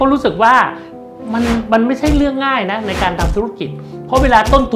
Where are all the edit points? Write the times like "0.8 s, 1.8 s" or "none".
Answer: none